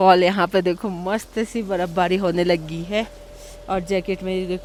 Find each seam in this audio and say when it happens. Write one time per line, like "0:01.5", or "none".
none